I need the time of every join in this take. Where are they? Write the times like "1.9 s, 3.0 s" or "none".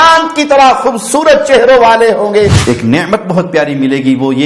2.6 s